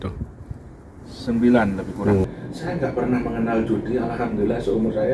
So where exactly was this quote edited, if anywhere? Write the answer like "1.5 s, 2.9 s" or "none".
2.3 s